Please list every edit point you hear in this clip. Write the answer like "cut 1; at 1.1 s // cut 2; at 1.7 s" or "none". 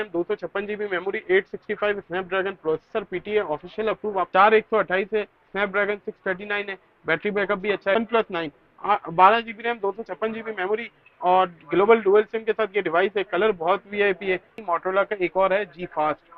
cut 1; at 4.3 s // cut 2; at 8.0 s // cut 3; at 14.6 s